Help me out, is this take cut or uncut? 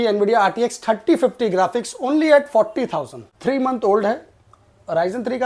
cut